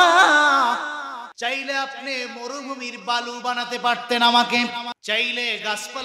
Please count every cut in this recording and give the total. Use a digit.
2